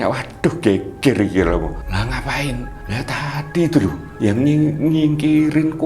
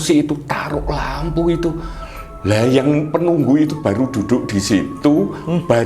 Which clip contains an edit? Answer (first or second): first